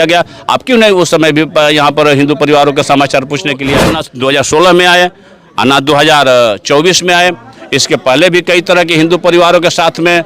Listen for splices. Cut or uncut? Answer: cut